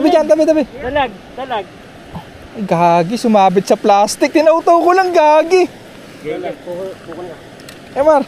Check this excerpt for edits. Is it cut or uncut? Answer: uncut